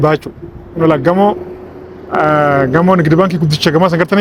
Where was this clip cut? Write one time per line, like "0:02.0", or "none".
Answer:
none